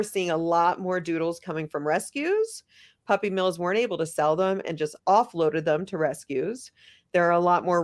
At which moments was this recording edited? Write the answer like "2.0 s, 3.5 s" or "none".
4.9 s